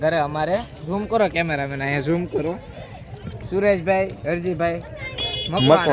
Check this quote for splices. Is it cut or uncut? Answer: uncut